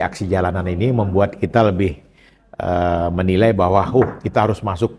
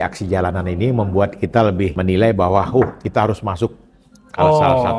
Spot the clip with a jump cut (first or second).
second